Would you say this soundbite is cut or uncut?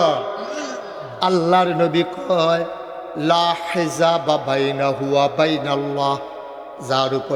cut